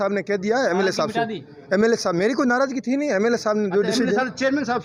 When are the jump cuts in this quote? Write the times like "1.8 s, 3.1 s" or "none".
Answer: none